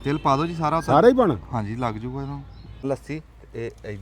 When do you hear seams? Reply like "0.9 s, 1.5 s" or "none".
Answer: 2.8 s